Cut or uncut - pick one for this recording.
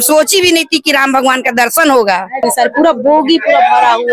cut